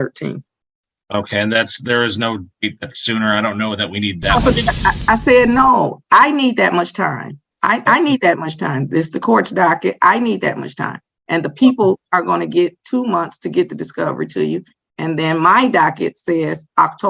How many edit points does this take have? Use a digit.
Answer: 1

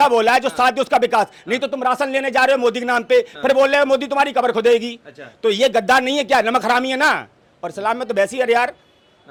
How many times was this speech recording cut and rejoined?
0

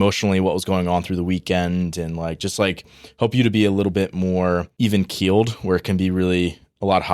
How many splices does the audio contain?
1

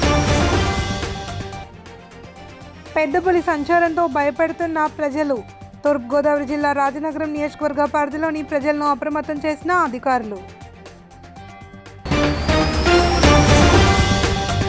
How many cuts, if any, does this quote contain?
0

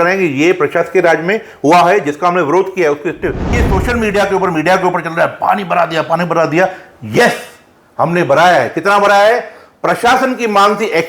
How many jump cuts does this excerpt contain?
1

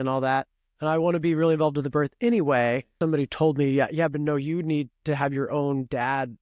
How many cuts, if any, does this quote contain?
1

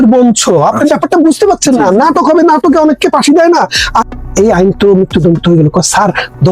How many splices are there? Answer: 1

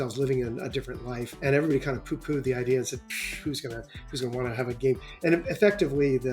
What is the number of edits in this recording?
1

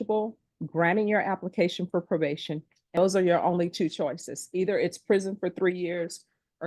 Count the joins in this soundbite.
1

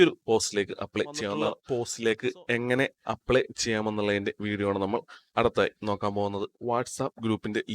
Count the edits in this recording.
2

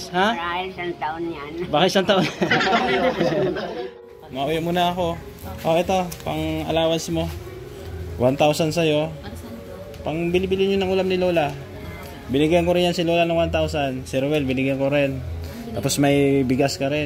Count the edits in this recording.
1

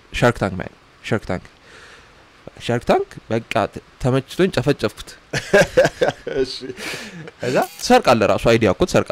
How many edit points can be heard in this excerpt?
1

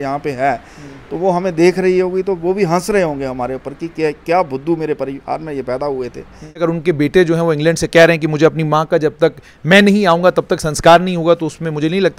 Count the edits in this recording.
1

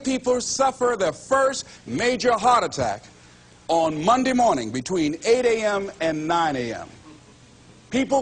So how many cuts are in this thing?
0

